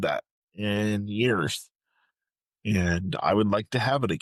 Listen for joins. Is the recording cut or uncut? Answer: uncut